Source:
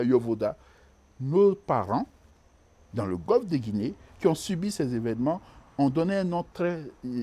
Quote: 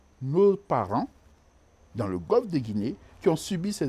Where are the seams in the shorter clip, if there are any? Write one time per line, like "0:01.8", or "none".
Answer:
none

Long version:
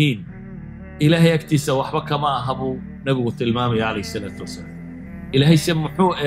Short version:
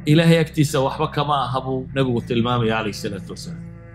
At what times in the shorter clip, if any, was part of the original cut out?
0:01.9

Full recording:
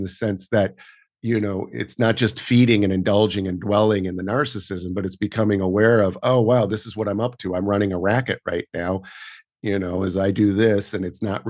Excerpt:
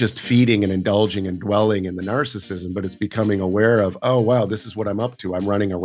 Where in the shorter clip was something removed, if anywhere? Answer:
none

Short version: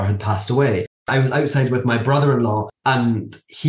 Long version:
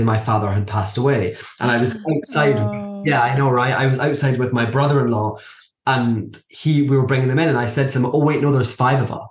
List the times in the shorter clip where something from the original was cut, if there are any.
0:01.1
0:02.7

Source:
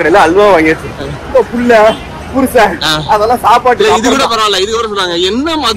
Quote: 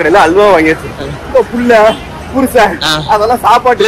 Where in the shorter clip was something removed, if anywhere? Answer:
none

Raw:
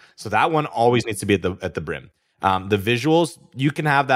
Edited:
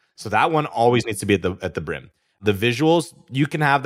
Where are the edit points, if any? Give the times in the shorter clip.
0:02.4

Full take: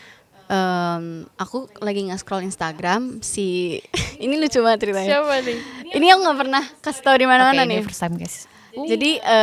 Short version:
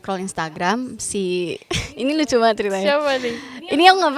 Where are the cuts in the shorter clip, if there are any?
none

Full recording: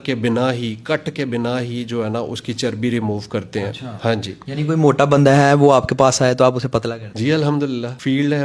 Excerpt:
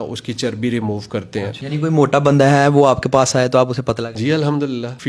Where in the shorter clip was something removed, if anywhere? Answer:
0:01.6
0:04.1

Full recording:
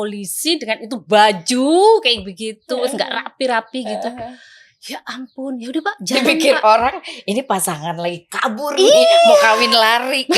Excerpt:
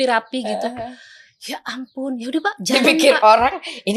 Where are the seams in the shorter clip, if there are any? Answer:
none

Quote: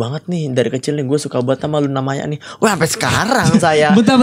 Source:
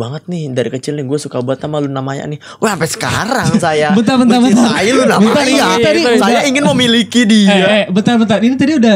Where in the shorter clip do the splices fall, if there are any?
none

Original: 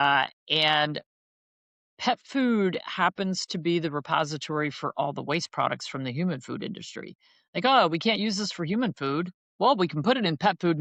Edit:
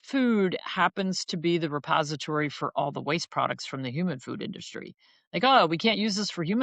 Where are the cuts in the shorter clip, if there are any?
none

